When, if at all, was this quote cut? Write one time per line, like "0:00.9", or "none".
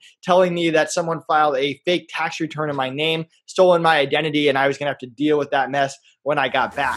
none